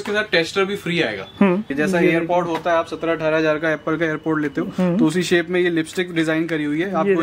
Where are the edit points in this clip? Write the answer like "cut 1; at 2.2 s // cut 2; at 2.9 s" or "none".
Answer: cut 1; at 1.7 s